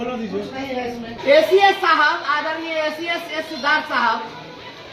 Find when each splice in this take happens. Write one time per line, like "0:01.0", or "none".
0:01.1